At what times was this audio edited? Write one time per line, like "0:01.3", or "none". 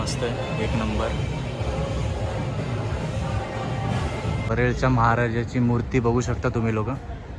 0:04.4